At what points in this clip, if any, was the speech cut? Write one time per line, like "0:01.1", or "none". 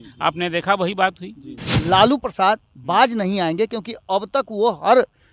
0:01.7